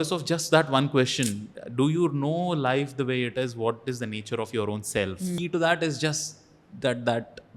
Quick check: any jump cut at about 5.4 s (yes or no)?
yes